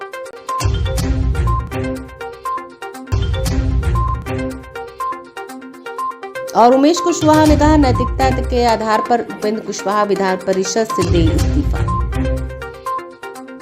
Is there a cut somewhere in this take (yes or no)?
yes